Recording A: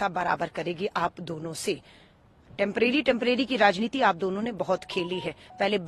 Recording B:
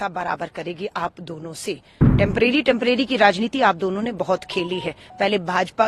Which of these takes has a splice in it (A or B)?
B